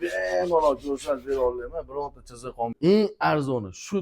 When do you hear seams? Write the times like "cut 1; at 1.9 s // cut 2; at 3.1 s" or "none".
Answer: cut 1; at 2.8 s